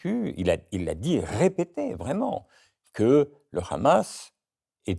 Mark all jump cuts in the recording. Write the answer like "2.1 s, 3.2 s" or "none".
none